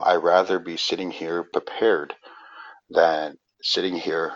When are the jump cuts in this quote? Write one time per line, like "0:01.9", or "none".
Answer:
0:01.5